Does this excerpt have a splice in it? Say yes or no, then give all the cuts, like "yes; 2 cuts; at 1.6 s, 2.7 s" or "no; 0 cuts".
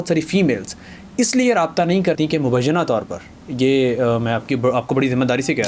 yes; 1 cut; at 2.2 s